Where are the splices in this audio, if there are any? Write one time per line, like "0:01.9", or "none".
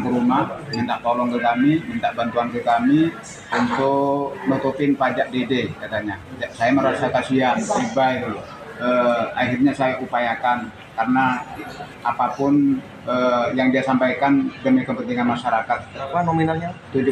0:16.0